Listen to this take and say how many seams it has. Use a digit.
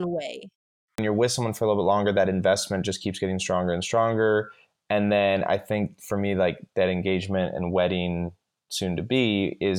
1